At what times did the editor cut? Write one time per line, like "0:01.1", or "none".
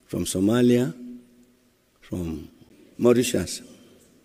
0:03.0